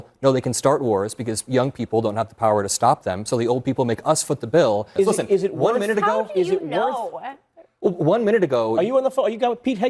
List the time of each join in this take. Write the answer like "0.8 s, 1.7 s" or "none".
4.9 s